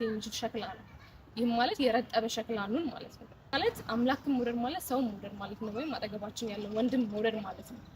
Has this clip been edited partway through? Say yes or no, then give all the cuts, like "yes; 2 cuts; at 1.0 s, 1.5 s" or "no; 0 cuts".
yes; 1 cut; at 3.5 s